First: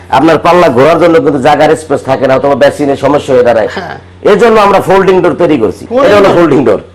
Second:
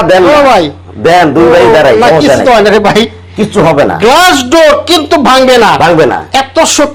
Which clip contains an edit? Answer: first; 1 cut; at 5.8 s

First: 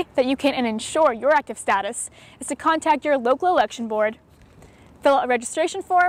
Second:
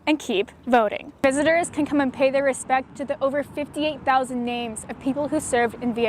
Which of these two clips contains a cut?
second; 1 cut; at 1.2 s

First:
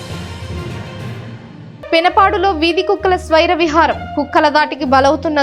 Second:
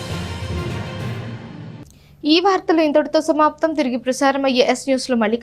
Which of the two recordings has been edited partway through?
first; 1 cut; at 1.3 s

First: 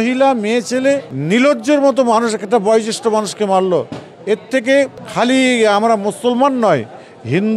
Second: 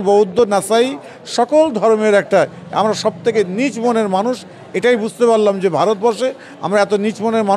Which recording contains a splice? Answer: first; 2 cuts; at 1.1 s, 5.0 s

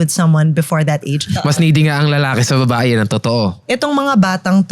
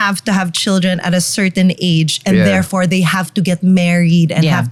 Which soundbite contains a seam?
first; 2 cuts; at 1.4 s, 3.6 s

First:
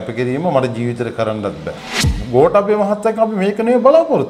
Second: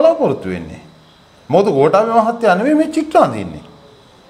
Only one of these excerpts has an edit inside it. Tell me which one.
first; 1 cut; at 2.0 s

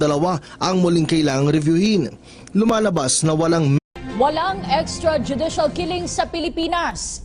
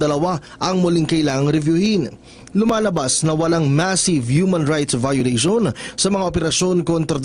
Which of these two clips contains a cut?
second; 1 cut; at 3.8 s

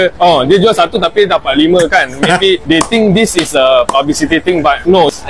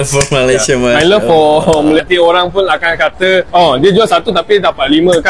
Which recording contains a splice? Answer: second; 1 cut; at 2.0 s

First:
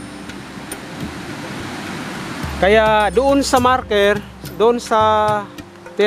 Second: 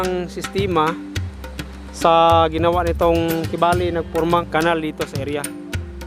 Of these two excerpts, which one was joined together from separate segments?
second; 1 cut; at 4.5 s

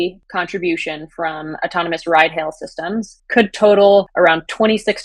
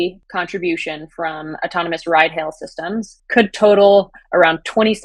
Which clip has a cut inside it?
first; 1 cut; at 4.1 s

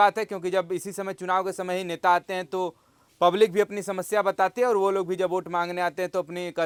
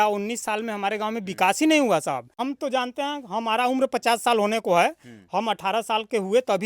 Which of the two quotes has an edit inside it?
second; 1 cut; at 2.4 s

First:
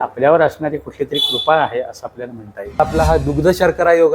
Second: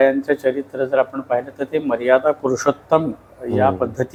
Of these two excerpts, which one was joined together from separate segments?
first; 1 cut; at 2.8 s

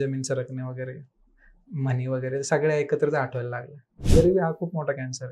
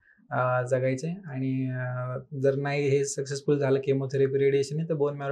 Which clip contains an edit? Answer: first; 1 cut; at 3.9 s

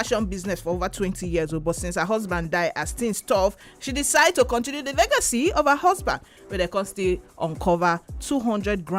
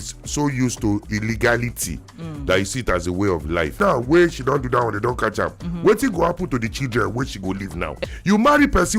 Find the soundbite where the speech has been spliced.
second; 2 cuts; at 3.7 s, 7.9 s

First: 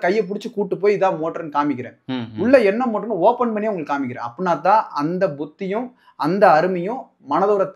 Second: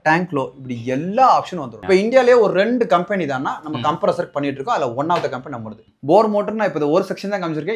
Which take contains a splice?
second; 2 cuts; at 1.8 s, 5.8 s

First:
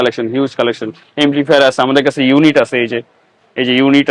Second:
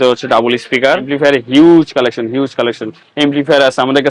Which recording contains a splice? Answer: second; 1 cut; at 1.1 s

